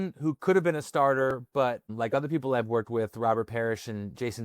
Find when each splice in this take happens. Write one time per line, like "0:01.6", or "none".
0:01.4